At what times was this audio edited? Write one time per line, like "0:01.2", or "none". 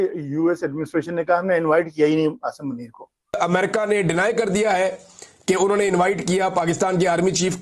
0:03.4